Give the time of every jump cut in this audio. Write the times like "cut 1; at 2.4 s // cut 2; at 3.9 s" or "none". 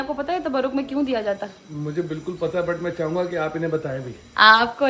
none